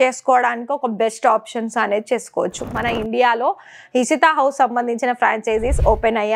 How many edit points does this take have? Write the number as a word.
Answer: one